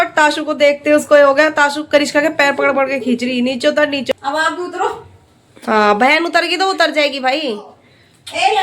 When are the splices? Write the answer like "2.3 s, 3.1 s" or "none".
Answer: 4.1 s